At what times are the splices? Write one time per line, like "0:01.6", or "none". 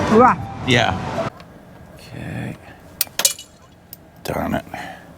0:01.3